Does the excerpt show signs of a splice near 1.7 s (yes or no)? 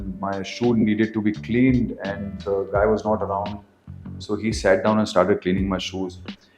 no